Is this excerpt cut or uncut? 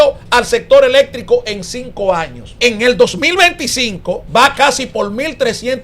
cut